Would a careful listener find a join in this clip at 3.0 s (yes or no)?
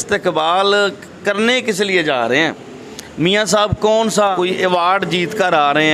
no